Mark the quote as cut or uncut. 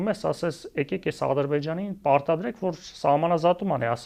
uncut